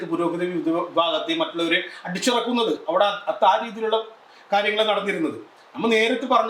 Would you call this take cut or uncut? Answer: uncut